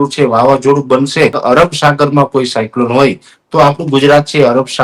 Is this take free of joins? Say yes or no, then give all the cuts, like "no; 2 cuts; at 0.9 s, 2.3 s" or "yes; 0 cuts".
no; 1 cut; at 1.4 s